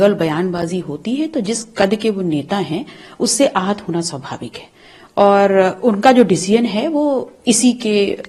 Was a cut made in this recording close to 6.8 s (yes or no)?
no